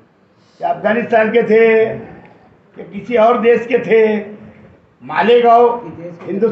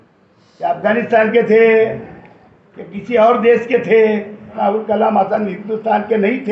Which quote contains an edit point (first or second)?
second